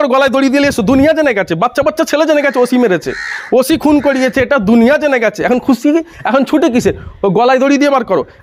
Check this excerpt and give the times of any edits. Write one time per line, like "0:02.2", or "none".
none

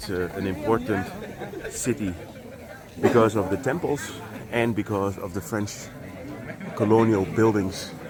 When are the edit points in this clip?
none

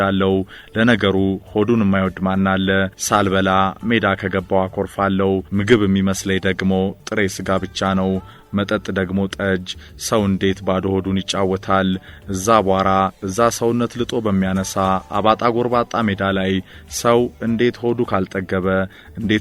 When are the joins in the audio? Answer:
none

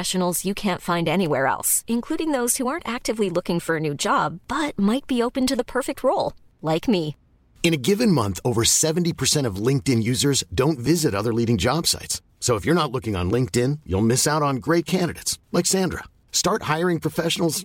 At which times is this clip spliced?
none

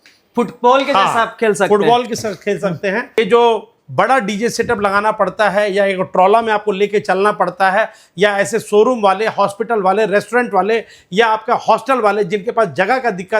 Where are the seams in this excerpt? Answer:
0:03.2

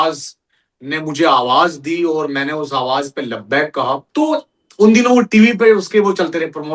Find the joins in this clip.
0:04.0

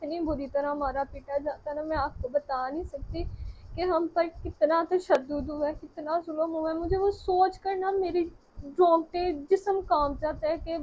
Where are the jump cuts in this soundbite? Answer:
none

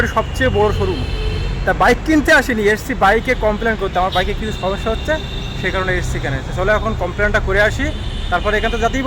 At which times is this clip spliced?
none

